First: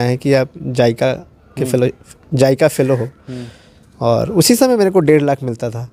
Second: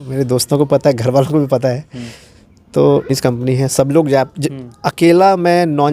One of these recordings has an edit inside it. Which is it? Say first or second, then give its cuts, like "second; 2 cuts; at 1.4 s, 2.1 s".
second; 1 cut; at 3.1 s